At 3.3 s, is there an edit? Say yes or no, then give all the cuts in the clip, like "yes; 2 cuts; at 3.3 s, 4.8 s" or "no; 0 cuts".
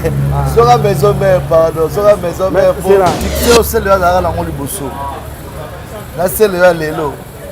yes; 1 cut; at 3.3 s